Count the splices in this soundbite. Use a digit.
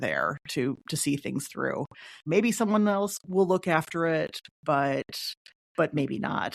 0